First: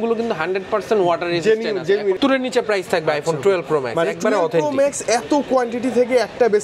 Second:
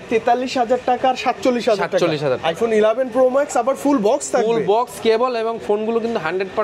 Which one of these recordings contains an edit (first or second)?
first